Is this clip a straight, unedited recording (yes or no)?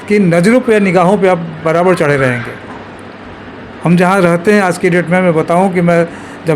yes